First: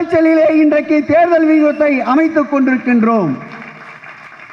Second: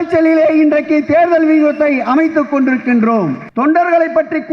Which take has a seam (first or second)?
second